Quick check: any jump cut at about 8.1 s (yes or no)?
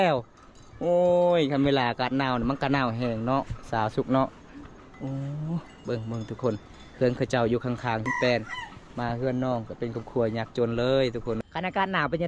yes